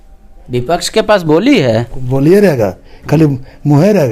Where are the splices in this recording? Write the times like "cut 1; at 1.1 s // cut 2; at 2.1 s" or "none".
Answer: none

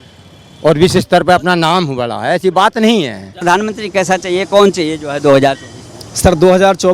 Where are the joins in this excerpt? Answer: cut 1; at 3.4 s

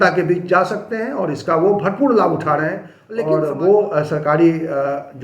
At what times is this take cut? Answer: cut 1; at 2.9 s

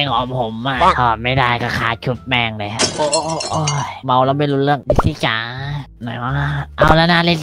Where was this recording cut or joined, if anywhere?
none

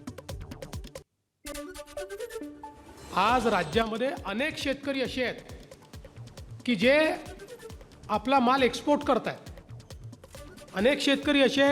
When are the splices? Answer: cut 1; at 1.1 s // cut 2; at 2.9 s

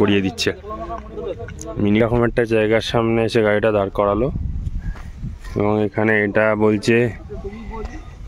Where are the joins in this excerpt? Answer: cut 1; at 2.0 s

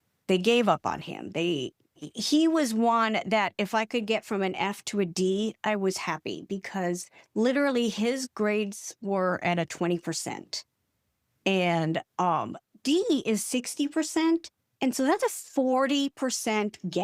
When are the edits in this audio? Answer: none

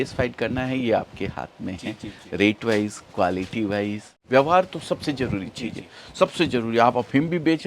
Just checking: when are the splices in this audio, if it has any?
cut 1; at 4.2 s

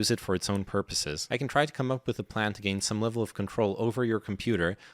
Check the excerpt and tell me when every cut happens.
cut 1; at 1.1 s

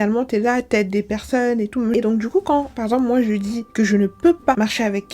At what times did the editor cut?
cut 1; at 1.9 s

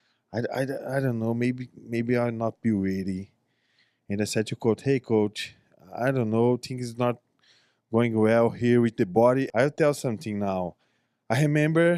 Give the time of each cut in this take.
cut 1; at 9.5 s

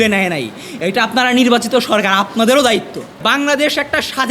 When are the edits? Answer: cut 1; at 3.2 s

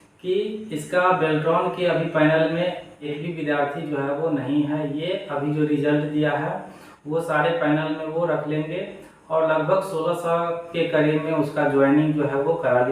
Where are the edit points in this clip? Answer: cut 1; at 3.1 s

